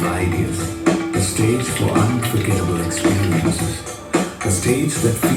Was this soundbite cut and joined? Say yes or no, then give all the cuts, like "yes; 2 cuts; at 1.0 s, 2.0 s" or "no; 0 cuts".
no; 0 cuts